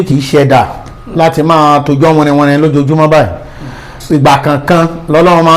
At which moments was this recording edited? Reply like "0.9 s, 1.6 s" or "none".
none